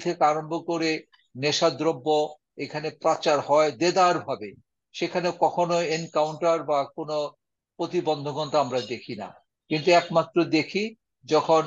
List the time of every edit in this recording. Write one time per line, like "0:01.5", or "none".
none